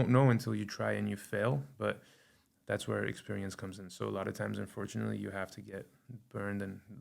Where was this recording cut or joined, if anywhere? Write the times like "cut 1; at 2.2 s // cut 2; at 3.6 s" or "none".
none